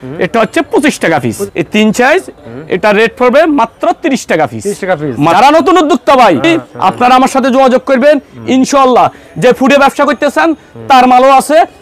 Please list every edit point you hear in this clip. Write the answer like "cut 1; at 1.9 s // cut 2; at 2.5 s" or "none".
cut 1; at 1.4 s // cut 2; at 5.3 s // cut 3; at 6.4 s